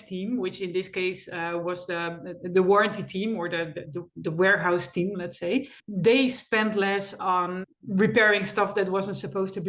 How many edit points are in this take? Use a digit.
2